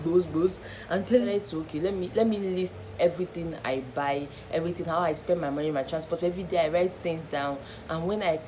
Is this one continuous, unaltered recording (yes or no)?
no